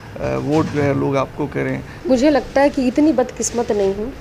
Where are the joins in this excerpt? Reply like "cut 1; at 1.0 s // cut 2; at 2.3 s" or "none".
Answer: cut 1; at 1.9 s